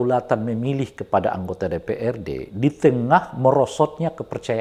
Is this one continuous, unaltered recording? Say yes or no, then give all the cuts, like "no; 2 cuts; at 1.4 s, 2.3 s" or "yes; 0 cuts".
yes; 0 cuts